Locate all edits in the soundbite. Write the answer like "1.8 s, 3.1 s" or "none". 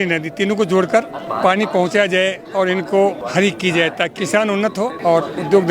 1.2 s, 3.2 s, 4.6 s

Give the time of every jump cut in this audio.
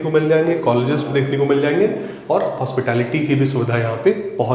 none

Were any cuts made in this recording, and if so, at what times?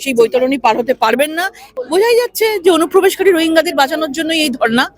1.6 s

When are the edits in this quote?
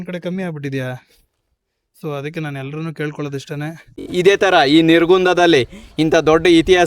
4.1 s

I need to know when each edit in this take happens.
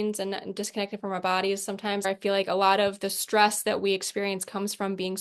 2.0 s

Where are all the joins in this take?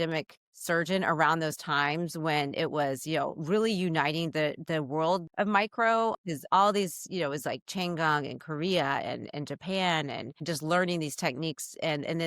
5.3 s

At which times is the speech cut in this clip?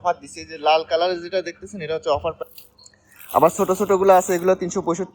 2.4 s

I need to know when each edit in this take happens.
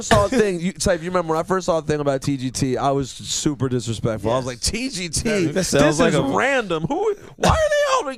none

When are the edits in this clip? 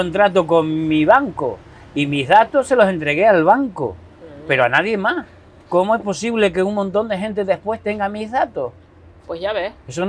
none

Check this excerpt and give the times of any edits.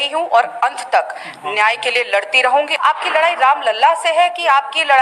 2.7 s

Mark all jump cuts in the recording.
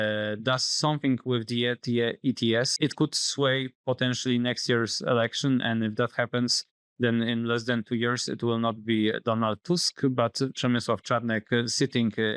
2.7 s

